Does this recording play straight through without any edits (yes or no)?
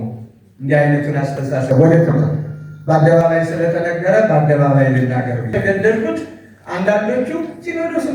no